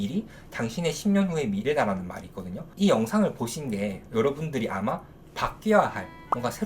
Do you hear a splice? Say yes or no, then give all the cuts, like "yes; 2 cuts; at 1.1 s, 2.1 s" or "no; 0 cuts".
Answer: yes; 1 cut; at 2.7 s